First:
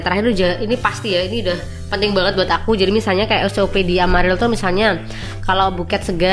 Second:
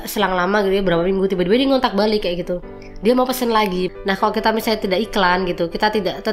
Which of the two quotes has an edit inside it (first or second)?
second